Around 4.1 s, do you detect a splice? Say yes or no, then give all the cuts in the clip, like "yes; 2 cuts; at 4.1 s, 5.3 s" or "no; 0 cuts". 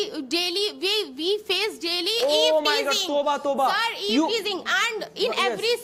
no; 0 cuts